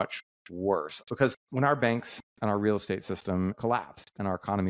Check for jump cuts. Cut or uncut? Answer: cut